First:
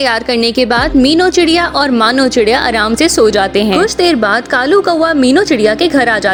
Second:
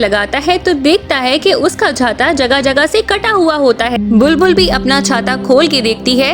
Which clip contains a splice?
second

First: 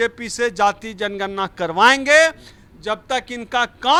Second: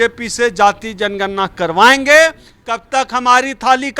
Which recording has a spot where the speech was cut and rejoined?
second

